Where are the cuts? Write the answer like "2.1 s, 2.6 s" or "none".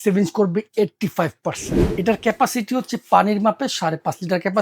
1.8 s